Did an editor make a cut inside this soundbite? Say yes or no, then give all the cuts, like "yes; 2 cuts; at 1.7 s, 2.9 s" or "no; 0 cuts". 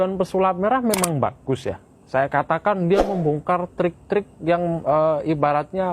no; 0 cuts